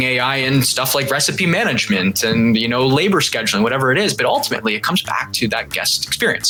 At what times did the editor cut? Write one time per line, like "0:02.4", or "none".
none